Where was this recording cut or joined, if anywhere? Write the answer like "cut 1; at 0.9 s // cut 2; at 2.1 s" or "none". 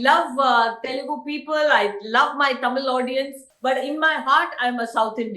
cut 1; at 3.5 s